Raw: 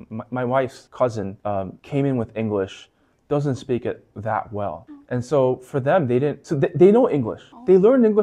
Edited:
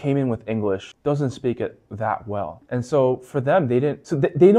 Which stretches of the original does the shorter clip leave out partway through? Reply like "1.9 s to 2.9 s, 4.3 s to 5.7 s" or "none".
2.8 s to 3.2 s, 4.8 s to 5.0 s